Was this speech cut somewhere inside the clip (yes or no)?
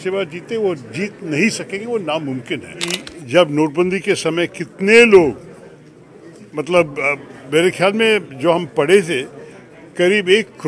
yes